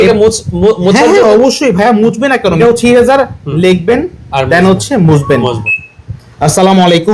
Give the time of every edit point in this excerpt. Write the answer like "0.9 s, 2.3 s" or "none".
2.6 s, 5.7 s